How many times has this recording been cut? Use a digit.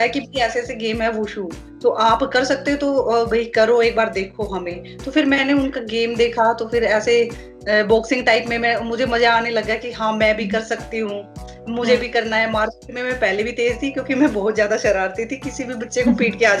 0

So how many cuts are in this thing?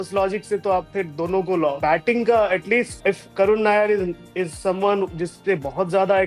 2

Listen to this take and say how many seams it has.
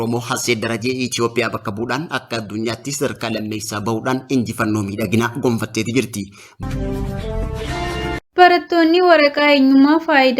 2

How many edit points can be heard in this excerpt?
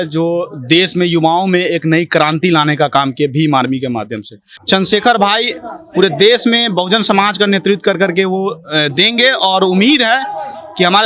1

